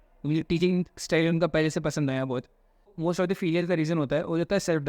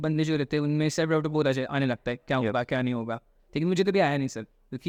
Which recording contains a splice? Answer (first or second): first